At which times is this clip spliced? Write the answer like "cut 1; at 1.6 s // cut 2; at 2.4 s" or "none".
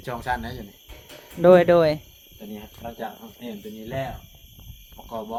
none